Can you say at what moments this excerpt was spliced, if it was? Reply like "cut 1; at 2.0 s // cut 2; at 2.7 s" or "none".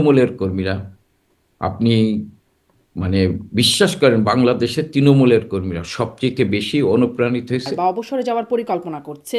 cut 1; at 7.7 s